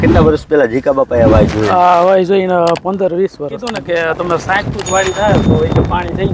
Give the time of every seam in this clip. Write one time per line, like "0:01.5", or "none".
0:03.7